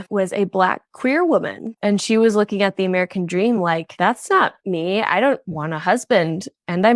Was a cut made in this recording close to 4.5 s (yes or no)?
no